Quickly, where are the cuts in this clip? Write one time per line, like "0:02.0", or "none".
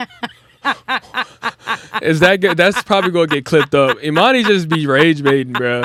none